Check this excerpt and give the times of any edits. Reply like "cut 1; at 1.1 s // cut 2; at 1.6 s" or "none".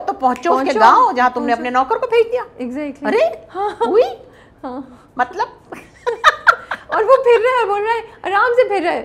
none